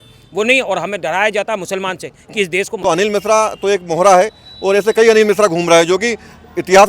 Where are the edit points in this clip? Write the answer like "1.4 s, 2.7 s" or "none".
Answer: 2.7 s